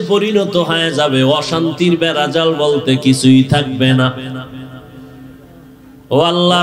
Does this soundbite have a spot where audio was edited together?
no; 0 cuts

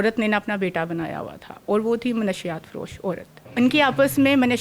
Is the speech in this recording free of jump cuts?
no; 1 cut; at 3.4 s

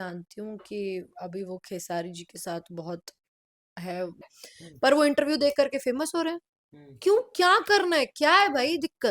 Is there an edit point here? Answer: yes; 1 cut; at 4.2 s

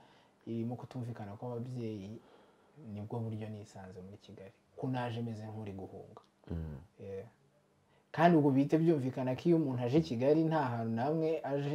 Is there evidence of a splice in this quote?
no; 0 cuts

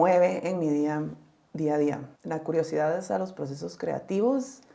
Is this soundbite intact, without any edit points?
no; 1 cut; at 2.1 s

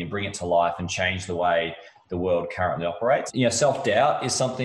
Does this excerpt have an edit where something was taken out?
yes; 1 cut; at 3.3 s

